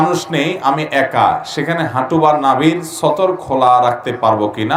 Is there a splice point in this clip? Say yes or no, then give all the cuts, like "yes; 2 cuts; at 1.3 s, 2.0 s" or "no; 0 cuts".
no; 0 cuts